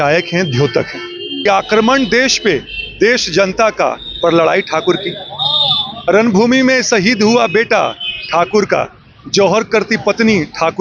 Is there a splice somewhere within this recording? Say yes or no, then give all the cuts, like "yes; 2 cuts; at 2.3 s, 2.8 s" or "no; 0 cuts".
yes; 1 cut; at 1.4 s